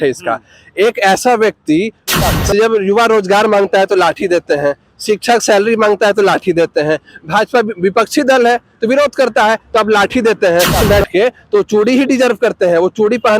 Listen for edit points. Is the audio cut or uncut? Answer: cut